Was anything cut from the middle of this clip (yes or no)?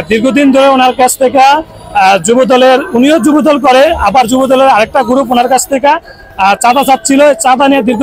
no